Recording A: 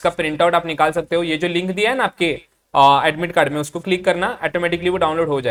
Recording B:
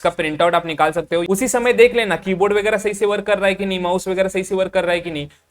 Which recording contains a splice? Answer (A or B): B